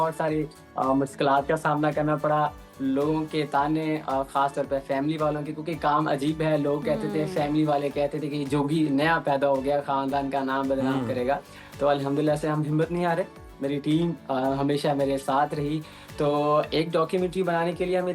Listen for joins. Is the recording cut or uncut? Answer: uncut